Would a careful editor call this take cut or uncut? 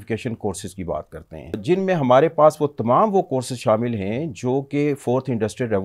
cut